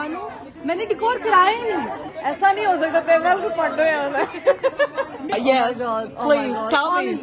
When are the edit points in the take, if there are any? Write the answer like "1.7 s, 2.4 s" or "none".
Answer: 2.0 s, 5.3 s